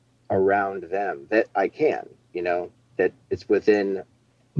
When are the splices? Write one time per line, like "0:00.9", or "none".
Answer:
0:02.9